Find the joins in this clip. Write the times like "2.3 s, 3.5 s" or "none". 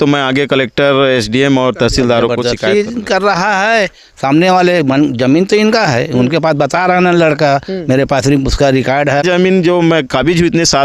2.4 s, 9.2 s